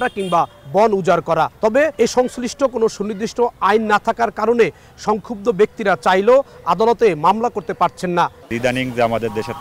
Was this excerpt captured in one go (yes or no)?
no